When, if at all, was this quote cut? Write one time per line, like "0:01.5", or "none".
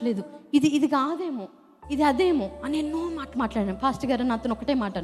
none

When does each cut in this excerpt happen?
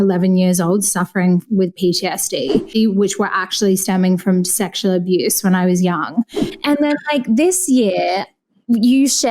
0:02.7
0:06.4

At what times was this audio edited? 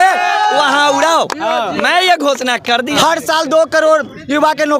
0:03.0

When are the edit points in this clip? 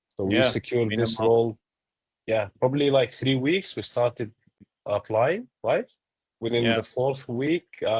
none

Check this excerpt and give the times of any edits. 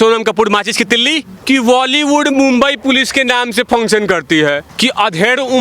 0:01.3
0:04.7

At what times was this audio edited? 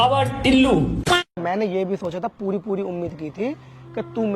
none

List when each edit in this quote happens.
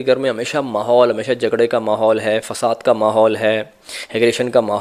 none

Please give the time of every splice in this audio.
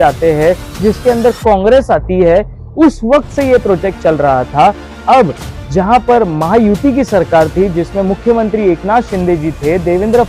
none

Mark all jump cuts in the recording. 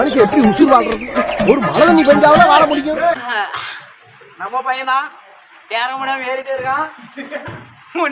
0:03.2

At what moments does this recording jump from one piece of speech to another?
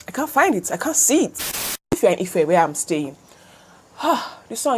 0:01.6

